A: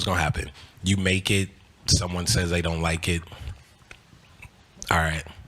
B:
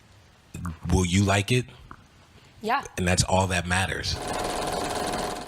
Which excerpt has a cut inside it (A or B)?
B